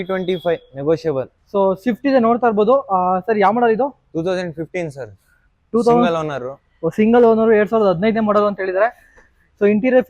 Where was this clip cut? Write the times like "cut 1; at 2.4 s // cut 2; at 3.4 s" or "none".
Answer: cut 1; at 1.4 s